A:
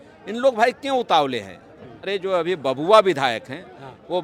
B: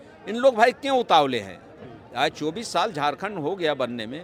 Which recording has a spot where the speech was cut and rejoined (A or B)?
A